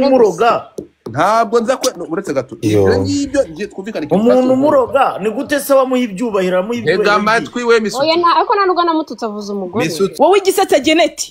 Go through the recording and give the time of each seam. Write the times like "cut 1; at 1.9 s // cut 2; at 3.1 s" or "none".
cut 1; at 10.1 s